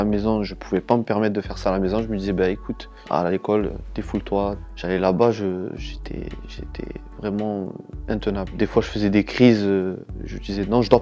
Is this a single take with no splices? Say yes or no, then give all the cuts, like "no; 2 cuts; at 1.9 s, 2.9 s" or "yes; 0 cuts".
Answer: yes; 0 cuts